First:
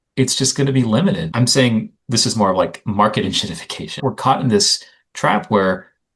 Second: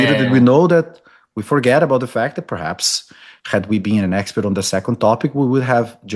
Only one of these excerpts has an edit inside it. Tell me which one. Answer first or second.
first